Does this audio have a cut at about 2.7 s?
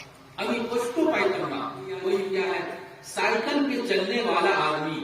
yes; 1 cut; at 2.7 s

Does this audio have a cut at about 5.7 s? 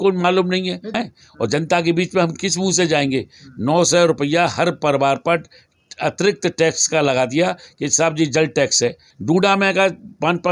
no; 2 cuts; at 0.9 s, 9.1 s

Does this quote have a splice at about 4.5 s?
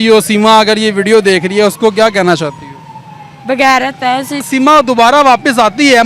yes; 1 cut; at 4.5 s

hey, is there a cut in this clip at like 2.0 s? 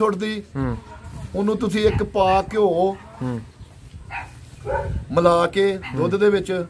no; 0 cuts

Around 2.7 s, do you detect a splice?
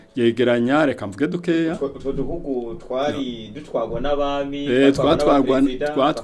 no; 0 cuts

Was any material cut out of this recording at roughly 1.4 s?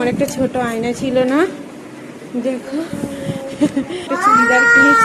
no; 1 cut; at 4.1 s

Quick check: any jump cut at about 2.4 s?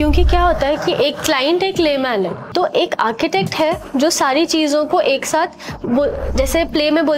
yes; 1 cut; at 2.4 s

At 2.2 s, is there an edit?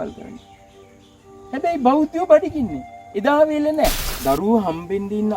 no; 1 cut; at 4.1 s

